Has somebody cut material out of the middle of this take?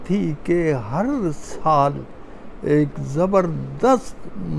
no; 0 cuts

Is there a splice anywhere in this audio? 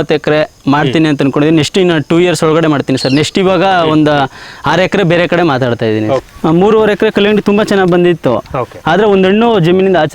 yes; 1 cut; at 6.2 s

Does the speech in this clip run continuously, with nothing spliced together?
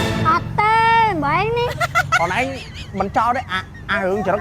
yes; 0 cuts

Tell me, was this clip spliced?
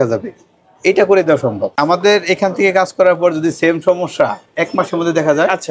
yes; 1 cut; at 1.8 s

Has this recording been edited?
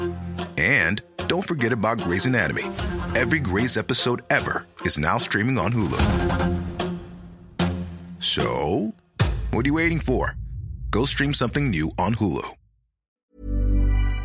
yes; 1 cut; at 13.2 s

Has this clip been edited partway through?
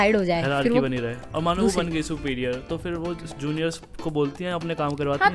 yes; 1 cut; at 1.2 s

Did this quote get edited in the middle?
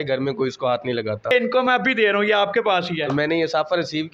yes; 2 cuts; at 1.3 s, 3.0 s

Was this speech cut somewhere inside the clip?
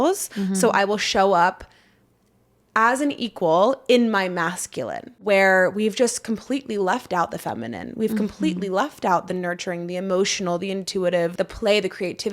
yes; 2 cuts; at 5.1 s, 11.3 s

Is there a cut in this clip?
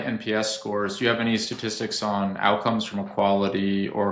no; 0 cuts

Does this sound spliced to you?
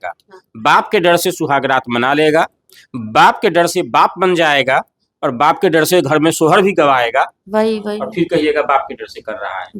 yes; 1 cut; at 7.4 s

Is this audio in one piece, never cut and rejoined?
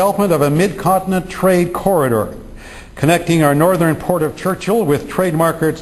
no; 1 cut; at 2.5 s

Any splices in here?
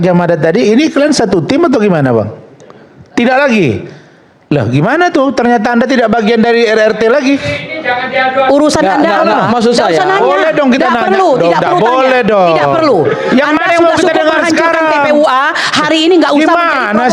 no; 0 cuts

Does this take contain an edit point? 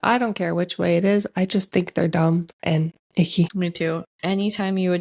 yes; 1 cut; at 4.1 s

